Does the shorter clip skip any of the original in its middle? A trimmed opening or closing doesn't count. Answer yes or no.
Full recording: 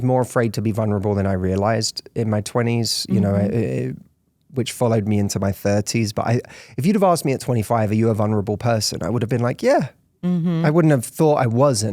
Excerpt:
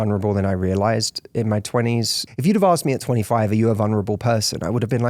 yes